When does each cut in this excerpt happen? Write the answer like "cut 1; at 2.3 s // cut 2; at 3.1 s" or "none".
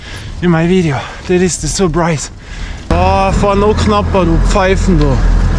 cut 1; at 2.9 s